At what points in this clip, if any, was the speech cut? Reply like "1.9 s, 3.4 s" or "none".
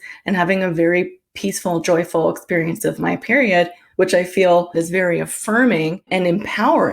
3.8 s, 4.7 s, 6.1 s